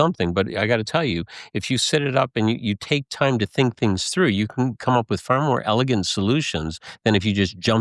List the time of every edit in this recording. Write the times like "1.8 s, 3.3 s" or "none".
none